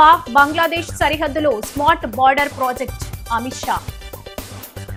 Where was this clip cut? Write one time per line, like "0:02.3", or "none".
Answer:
none